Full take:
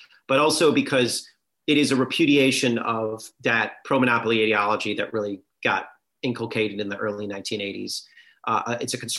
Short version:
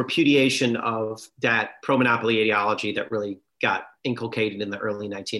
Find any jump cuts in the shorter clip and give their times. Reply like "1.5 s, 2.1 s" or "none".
3.9 s